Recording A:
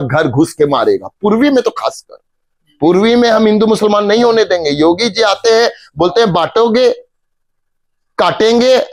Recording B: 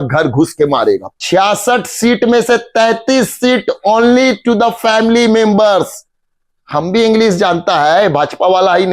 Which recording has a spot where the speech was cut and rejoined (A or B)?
B